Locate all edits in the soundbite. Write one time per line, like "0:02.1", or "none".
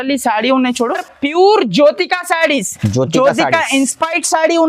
0:01.1